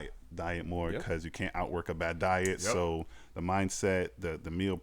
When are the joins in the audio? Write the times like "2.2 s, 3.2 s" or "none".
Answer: none